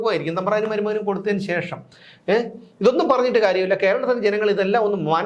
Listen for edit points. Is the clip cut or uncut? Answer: uncut